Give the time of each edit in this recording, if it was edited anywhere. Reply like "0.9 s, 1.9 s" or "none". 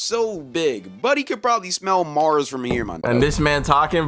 3.0 s